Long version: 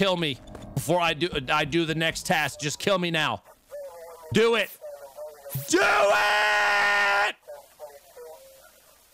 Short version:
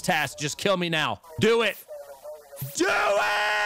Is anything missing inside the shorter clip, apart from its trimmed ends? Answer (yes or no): yes